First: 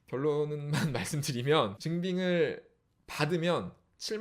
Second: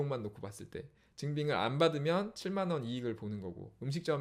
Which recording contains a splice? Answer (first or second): first